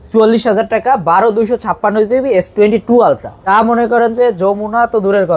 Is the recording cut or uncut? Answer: cut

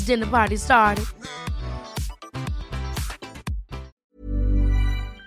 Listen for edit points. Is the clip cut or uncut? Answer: cut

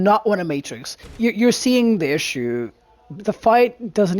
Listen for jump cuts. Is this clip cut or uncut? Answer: cut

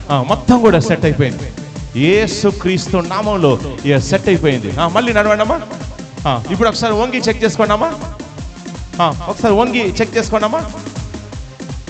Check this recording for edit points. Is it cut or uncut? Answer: uncut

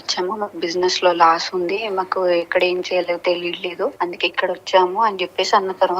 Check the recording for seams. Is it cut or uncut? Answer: cut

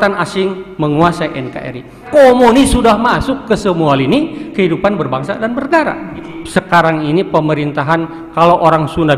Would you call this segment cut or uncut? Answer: cut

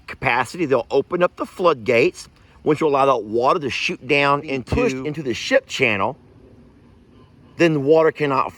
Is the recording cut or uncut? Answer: cut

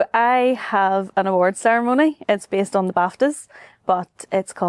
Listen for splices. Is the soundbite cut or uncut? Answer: uncut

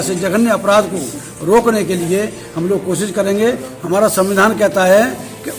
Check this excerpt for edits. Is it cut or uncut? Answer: cut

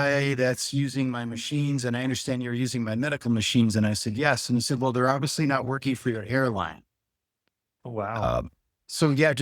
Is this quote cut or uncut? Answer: uncut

